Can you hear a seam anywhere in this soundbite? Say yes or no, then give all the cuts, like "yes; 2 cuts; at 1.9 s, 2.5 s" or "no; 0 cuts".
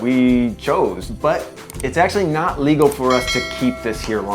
yes; 1 cut; at 1.1 s